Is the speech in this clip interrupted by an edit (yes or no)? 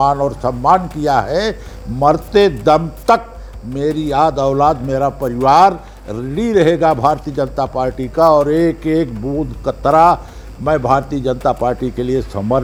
no